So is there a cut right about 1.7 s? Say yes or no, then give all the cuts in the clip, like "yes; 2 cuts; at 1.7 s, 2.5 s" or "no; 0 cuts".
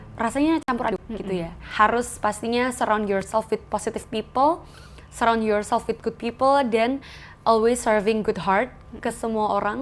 yes; 1 cut; at 1.7 s